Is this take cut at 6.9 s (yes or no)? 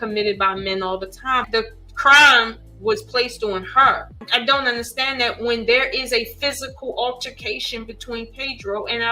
no